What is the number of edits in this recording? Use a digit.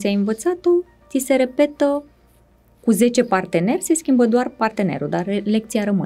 0